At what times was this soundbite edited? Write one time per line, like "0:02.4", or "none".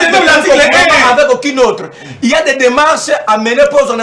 none

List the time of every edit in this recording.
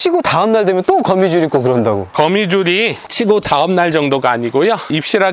none

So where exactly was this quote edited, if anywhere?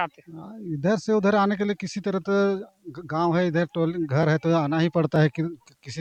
none

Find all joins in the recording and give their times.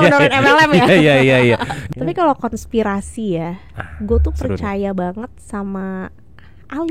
0:01.8

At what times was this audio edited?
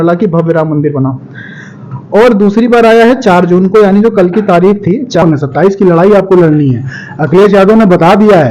0:05.2

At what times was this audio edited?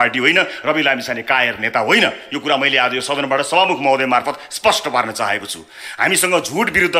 none

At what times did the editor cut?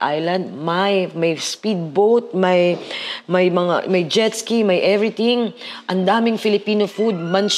none

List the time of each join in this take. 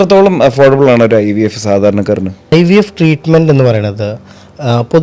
0:02.5

